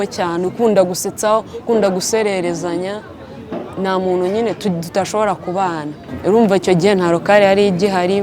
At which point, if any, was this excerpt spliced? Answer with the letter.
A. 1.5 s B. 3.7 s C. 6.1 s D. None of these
C